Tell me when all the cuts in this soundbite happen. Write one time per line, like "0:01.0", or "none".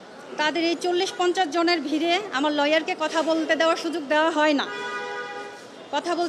none